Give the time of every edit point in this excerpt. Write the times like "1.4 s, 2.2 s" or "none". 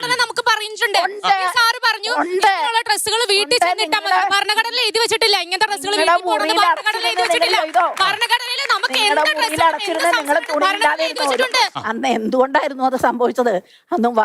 11.8 s